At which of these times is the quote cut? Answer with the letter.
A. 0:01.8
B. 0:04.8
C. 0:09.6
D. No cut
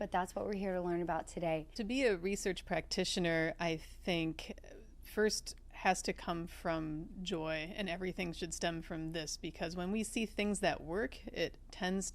A